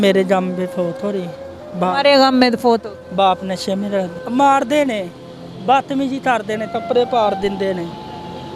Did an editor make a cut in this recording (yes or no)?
yes